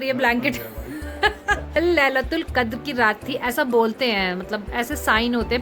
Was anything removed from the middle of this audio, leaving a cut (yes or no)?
yes